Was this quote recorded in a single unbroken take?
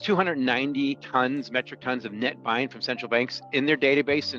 no; 1 cut; at 1.0 s

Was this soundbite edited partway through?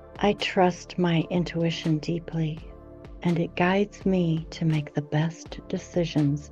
no; 0 cuts

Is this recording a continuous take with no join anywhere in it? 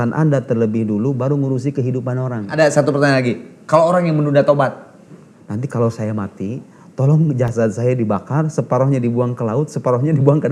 no; 2 cuts; at 2.5 s, 5.2 s

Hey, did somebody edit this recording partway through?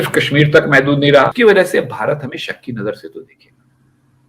yes; 1 cut; at 1.3 s

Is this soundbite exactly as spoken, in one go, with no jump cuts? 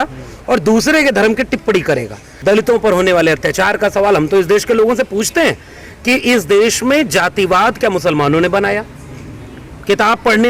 no; 1 cut; at 2.3 s

